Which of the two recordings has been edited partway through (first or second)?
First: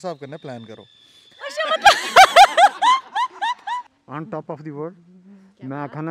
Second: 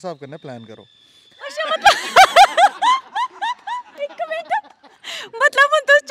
first